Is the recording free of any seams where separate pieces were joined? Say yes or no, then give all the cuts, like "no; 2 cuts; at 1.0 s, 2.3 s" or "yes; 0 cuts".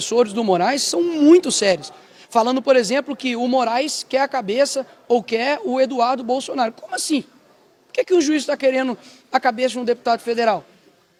yes; 0 cuts